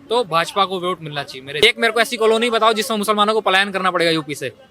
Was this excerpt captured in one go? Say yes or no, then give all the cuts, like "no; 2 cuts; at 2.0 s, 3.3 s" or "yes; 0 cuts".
no; 1 cut; at 1.6 s